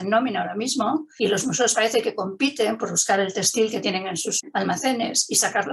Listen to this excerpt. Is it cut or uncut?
cut